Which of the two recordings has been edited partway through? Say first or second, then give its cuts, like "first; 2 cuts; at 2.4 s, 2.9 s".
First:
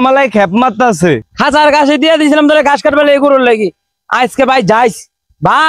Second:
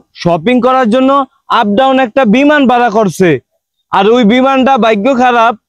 first; 1 cut; at 1.3 s